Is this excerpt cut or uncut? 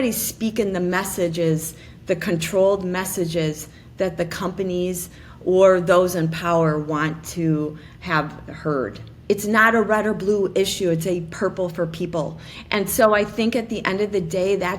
cut